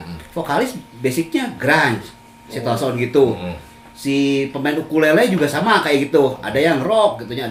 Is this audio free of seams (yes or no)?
yes